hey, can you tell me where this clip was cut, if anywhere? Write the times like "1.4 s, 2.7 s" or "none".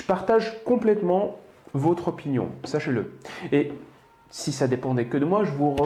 none